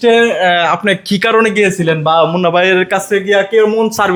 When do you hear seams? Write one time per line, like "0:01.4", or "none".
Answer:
none